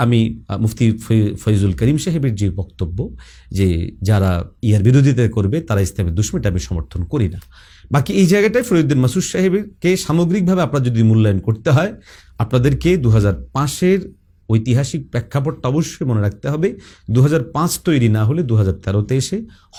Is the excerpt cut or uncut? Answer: uncut